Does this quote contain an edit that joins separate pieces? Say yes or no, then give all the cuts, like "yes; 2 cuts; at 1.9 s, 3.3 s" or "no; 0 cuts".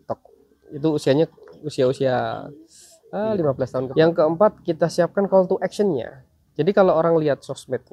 yes; 1 cut; at 3.9 s